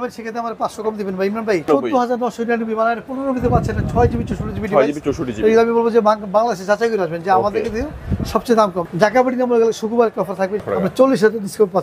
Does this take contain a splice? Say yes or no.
yes